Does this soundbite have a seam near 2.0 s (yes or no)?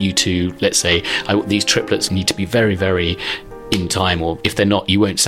yes